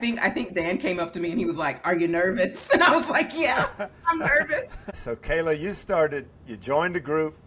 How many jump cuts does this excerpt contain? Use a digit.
1